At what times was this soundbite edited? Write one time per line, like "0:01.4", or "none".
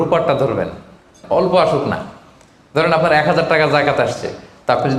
0:01.2